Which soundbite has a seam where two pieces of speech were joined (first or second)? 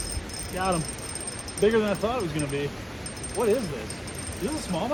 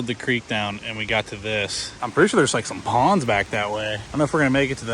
second